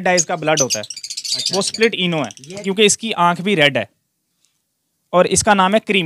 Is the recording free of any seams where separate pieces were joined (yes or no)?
no